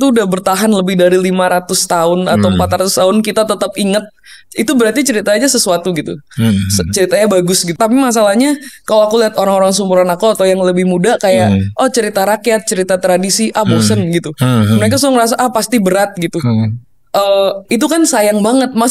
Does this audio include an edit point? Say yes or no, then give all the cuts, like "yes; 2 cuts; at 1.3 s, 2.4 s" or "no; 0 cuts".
yes; 1 cut; at 7.7 s